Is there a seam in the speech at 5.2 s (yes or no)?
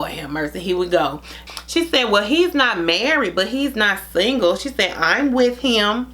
no